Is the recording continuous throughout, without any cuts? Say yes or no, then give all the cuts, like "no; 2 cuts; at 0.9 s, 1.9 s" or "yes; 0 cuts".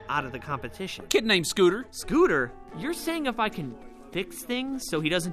no; 2 cuts; at 1.0 s, 2.6 s